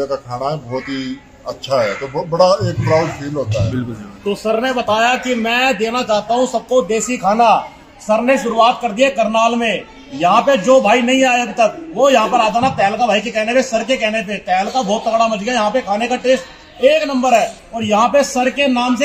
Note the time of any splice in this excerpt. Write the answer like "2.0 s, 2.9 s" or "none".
none